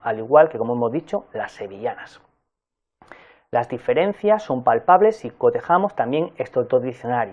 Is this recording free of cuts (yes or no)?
yes